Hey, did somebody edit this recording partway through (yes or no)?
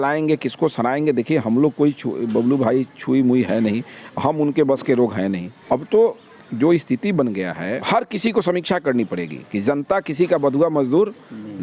yes